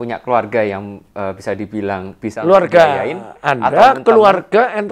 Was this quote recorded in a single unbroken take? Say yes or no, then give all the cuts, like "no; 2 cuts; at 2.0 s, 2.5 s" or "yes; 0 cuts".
yes; 0 cuts